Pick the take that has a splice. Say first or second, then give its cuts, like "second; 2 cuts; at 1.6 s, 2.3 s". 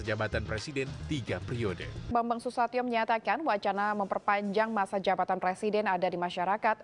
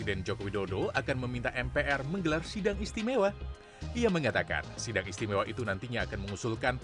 first; 1 cut; at 2.1 s